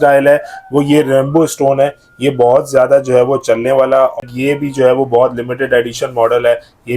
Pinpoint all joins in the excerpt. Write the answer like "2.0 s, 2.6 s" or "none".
4.2 s